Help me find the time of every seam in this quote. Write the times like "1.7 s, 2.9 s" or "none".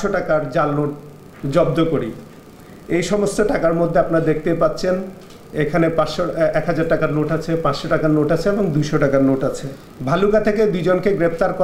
none

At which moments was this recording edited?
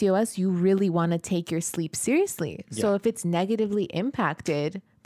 none

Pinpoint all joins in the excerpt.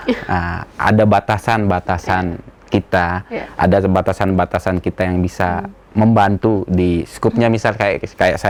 none

